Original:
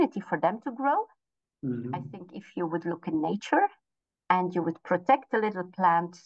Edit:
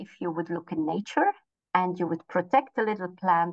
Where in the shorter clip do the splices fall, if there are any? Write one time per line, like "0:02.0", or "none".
0:01.5